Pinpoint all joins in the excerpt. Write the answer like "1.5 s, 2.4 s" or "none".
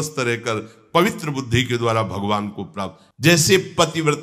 3.0 s